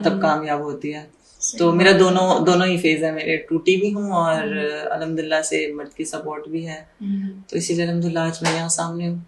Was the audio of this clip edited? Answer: no; 0 cuts

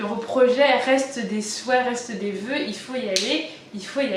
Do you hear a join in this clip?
no; 0 cuts

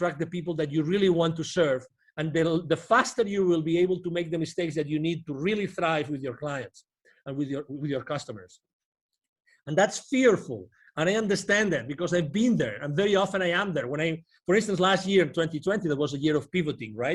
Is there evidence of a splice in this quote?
no; 0 cuts

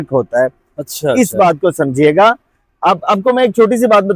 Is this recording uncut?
yes; 0 cuts

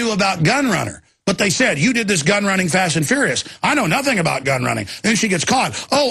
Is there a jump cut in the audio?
yes; 1 cut; at 5.2 s

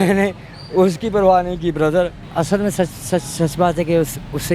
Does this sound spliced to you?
yes; 1 cut; at 2.2 s

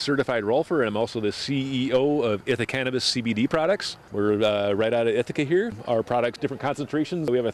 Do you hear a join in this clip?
no; 0 cuts

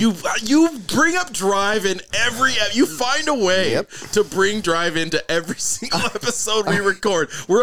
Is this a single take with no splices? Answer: yes; 0 cuts

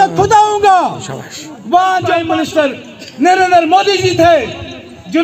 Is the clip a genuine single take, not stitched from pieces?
no; 1 cut; at 2.2 s

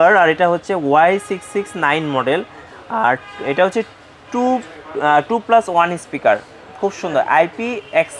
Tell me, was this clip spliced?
no; 0 cuts

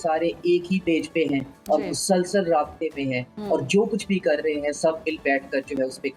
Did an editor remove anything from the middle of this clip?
no; 0 cuts

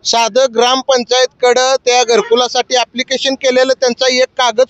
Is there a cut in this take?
no; 0 cuts

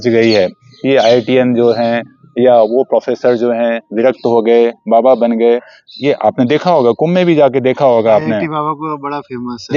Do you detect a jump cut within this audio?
no; 0 cuts

